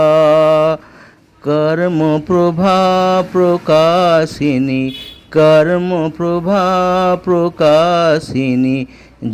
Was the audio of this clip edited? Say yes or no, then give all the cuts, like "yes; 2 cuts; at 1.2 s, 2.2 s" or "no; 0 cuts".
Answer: no; 0 cuts